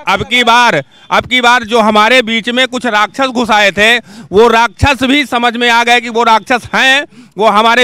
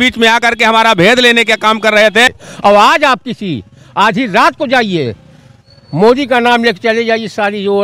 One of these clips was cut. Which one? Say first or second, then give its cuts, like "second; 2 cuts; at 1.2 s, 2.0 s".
second; 1 cut; at 2.3 s